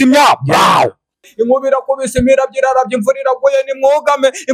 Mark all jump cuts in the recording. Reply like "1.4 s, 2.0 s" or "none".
1.3 s